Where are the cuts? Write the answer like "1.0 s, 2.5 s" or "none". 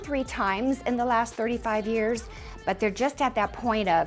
none